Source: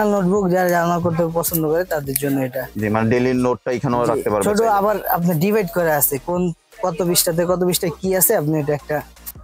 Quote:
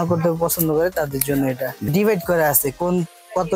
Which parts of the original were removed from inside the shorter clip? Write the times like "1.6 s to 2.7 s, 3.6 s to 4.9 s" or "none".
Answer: 2.8 s to 5.4 s